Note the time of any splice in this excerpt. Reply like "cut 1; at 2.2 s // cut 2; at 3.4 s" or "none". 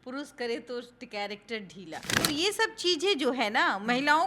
cut 1; at 2.1 s